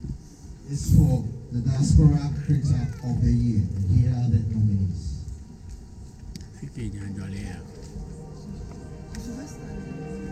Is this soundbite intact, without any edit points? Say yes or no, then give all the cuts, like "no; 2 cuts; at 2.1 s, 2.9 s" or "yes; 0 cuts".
yes; 0 cuts